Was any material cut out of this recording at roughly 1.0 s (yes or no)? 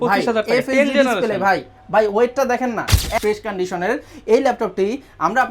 no